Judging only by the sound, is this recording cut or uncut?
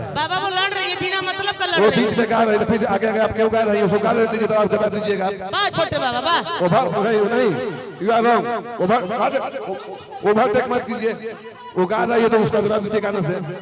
uncut